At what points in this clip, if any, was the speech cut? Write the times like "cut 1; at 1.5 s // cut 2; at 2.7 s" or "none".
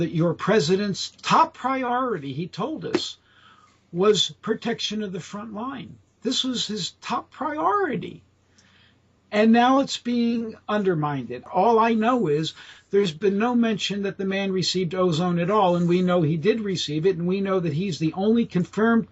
cut 1; at 11.4 s

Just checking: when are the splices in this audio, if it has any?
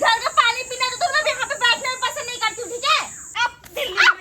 cut 1; at 3.2 s

